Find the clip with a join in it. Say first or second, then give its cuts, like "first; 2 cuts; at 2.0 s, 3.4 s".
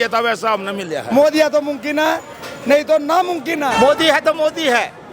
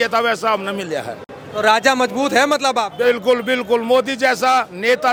first; 2 cuts; at 1.0 s, 3.7 s